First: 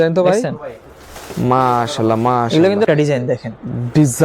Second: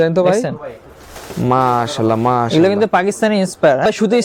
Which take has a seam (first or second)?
first